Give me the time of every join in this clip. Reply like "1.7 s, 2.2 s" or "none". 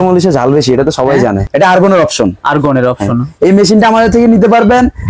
1.5 s